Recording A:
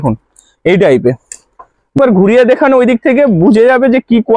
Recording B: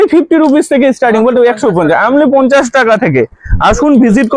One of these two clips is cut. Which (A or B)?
A